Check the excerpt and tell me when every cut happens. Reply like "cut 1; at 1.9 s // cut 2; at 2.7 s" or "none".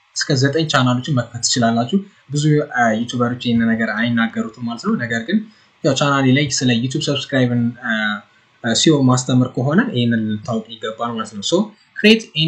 none